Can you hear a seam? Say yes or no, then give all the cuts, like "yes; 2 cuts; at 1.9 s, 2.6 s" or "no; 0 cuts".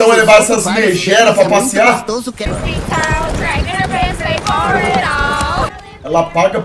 yes; 2 cuts; at 2.5 s, 5.7 s